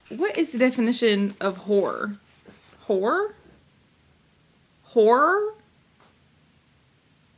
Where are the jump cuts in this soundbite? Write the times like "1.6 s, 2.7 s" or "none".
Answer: none